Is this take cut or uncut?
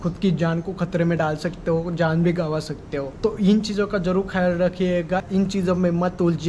cut